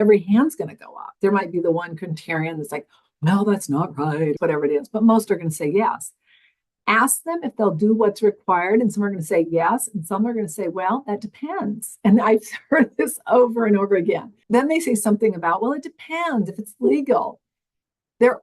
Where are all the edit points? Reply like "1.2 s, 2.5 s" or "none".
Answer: 14.3 s